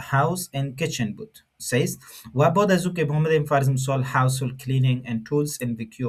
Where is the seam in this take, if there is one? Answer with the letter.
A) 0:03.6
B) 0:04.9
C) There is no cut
C